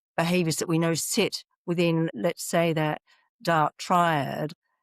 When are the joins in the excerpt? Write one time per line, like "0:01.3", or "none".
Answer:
0:02.1